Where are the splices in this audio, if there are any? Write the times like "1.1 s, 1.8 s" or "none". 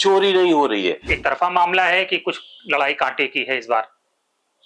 1.1 s